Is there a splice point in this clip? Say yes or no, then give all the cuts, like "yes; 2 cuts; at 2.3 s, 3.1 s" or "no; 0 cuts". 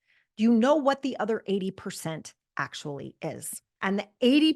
yes; 1 cut; at 3.6 s